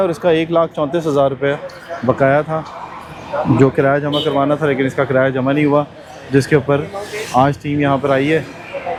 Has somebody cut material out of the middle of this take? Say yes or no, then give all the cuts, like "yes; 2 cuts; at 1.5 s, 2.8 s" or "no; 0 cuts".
no; 0 cuts